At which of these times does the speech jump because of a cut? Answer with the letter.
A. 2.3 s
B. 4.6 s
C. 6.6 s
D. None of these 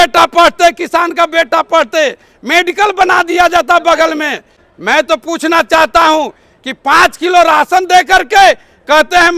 B